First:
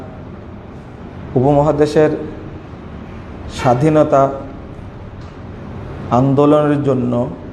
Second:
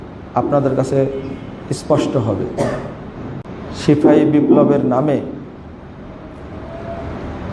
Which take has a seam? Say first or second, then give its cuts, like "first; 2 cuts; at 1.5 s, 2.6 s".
second; 1 cut; at 3.4 s